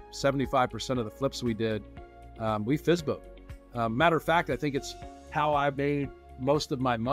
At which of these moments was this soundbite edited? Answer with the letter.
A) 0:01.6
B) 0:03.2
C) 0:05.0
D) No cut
D